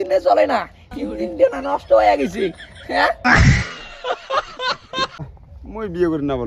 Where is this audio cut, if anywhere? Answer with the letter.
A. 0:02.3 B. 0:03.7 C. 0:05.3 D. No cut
C